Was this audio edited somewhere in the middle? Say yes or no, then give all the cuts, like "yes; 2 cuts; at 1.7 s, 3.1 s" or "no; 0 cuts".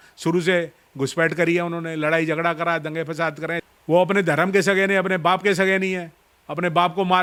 no; 0 cuts